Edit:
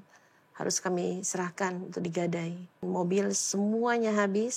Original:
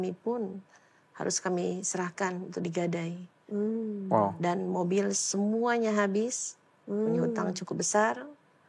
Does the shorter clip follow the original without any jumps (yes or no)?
no